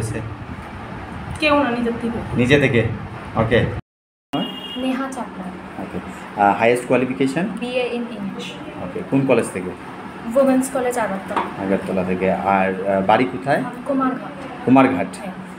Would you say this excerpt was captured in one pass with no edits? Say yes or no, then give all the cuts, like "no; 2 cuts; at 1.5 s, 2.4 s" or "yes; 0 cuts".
no; 1 cut; at 3.9 s